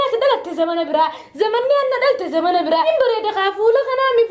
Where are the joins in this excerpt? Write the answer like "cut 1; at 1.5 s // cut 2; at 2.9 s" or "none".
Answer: cut 1; at 2.9 s